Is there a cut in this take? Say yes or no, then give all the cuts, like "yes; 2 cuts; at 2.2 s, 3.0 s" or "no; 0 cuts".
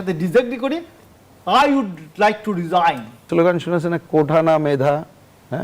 yes; 1 cut; at 3.3 s